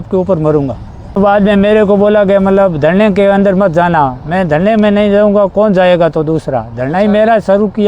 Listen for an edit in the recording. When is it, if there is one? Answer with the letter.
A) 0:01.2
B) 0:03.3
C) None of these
A